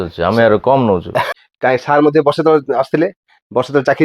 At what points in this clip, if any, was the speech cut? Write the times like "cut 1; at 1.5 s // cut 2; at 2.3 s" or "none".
cut 1; at 1.3 s

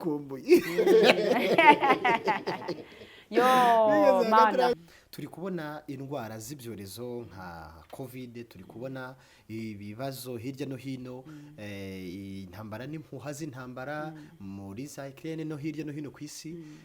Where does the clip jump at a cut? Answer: cut 1; at 4.8 s

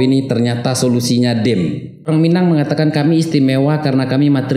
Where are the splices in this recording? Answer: cut 1; at 2.0 s

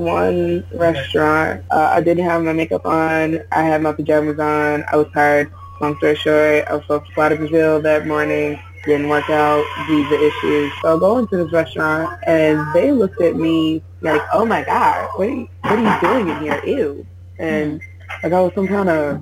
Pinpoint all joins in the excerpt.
none

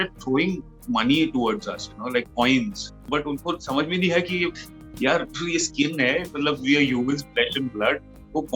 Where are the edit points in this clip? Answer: cut 1; at 3.1 s

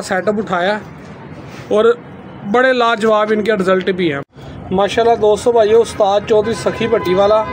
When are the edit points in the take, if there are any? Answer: cut 1; at 4.2 s

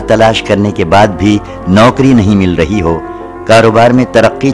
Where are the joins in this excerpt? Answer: none

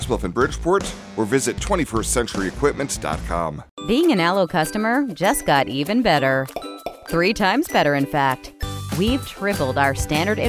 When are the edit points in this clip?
cut 1; at 3.7 s

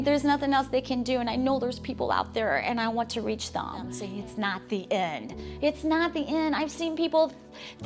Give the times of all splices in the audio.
cut 1; at 4.0 s

